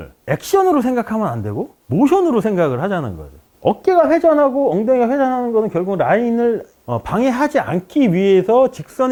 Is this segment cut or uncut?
uncut